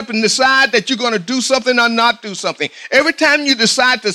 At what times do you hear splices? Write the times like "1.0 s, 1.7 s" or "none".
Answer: none